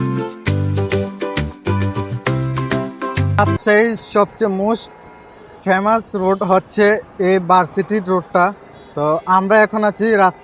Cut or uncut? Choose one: uncut